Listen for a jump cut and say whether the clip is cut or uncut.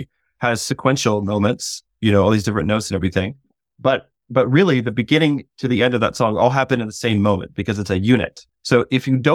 cut